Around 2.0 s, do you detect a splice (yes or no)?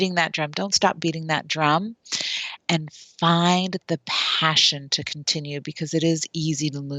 no